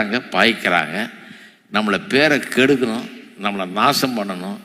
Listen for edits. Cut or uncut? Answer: uncut